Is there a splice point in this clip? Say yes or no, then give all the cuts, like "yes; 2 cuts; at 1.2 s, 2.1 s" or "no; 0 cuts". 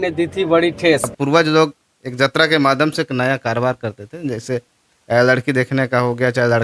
yes; 1 cut; at 1.1 s